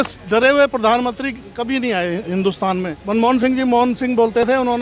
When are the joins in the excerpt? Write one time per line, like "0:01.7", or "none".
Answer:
0:03.0